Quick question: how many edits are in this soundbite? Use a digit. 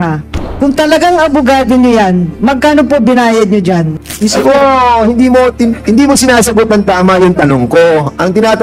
1